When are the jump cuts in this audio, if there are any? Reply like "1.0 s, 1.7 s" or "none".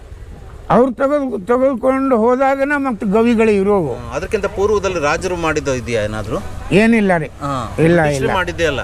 none